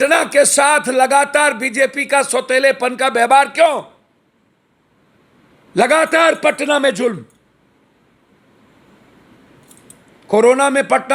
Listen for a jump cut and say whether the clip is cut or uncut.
uncut